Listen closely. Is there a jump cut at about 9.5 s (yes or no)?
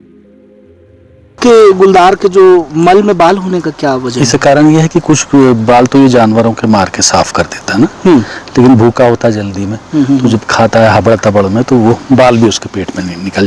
no